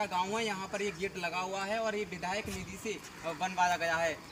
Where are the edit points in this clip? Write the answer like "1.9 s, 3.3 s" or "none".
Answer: none